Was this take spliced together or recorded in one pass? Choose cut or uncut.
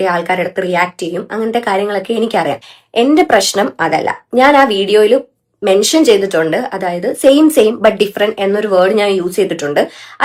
uncut